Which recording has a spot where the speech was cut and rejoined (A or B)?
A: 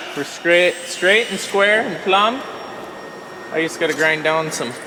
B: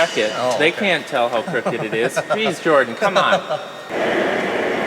B